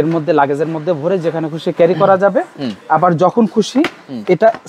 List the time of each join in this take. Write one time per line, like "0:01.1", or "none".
none